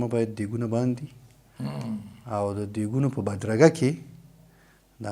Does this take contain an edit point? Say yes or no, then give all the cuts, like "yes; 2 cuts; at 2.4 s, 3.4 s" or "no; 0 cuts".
no; 0 cuts